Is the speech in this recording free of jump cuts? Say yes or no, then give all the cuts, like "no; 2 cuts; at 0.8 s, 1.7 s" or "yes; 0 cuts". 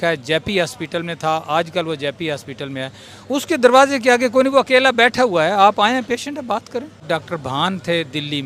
no; 1 cut; at 7.0 s